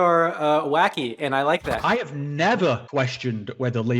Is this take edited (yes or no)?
yes